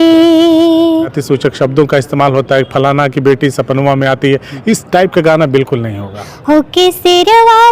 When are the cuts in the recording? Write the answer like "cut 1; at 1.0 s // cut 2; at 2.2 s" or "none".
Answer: cut 1; at 1.2 s // cut 2; at 6.3 s